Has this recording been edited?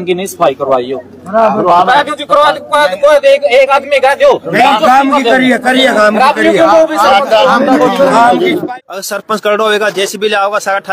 yes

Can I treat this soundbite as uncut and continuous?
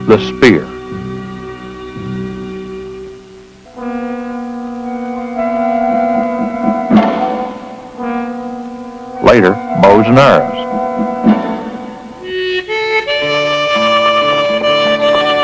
yes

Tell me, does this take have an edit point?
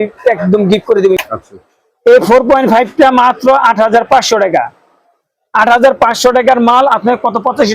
yes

